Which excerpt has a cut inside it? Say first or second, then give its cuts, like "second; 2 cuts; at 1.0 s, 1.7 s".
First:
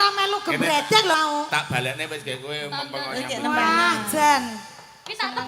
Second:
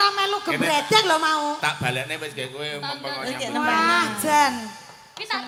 first; 1 cut; at 1.1 s